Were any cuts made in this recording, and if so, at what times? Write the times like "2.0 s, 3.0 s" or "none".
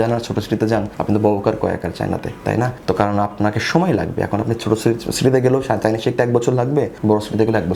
none